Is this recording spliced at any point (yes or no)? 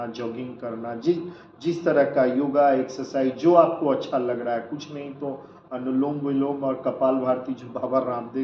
no